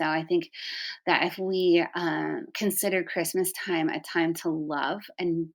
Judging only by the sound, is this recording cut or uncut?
uncut